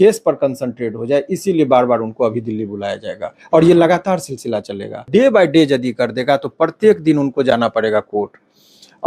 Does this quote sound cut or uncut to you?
cut